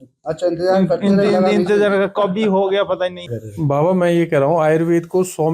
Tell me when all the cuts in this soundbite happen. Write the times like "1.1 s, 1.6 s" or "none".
3.3 s